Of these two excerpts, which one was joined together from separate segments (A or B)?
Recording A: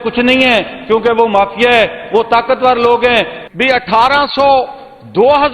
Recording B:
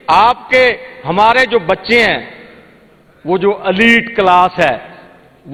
A